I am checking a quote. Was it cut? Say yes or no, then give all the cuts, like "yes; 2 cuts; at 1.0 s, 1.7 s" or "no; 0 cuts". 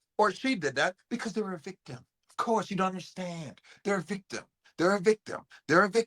no; 0 cuts